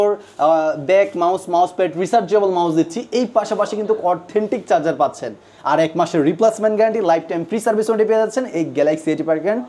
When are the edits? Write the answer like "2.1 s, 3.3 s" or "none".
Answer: none